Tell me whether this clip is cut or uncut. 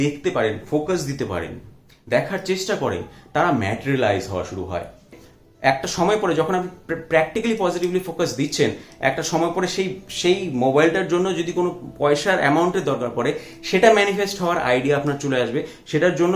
cut